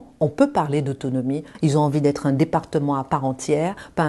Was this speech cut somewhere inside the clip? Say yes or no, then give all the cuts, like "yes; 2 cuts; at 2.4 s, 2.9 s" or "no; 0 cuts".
yes; 1 cut; at 1.4 s